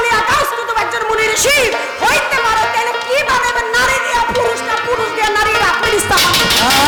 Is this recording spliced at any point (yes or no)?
no